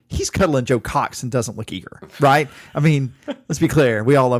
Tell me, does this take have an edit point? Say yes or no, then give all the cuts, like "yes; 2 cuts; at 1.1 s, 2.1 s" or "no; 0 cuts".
no; 0 cuts